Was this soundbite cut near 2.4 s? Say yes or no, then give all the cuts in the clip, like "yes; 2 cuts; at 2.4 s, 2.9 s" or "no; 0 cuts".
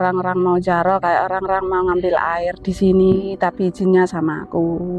no; 0 cuts